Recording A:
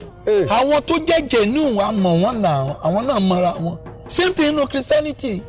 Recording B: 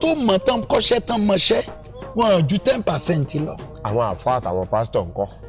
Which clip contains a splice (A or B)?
A